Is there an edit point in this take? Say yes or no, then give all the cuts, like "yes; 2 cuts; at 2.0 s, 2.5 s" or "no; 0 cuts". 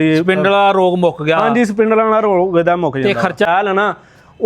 yes; 1 cut; at 3.5 s